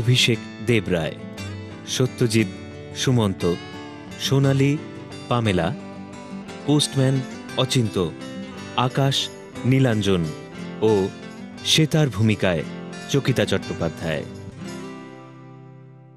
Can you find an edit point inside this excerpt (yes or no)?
yes